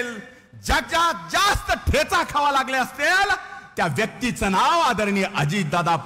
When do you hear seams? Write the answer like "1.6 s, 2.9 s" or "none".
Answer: none